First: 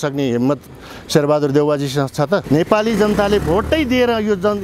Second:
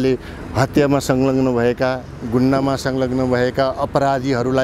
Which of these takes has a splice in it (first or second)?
first